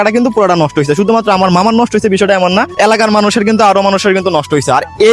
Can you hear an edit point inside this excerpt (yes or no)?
yes